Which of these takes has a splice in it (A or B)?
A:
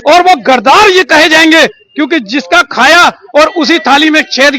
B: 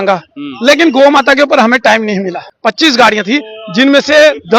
B